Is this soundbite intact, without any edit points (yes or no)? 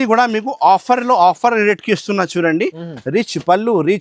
yes